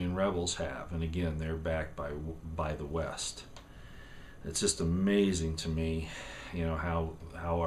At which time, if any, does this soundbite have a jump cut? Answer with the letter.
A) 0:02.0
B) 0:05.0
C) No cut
B